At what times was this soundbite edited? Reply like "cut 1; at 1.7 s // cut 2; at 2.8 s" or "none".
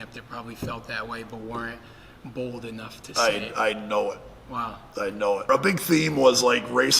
cut 1; at 5.5 s